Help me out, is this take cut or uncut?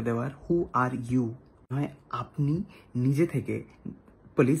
cut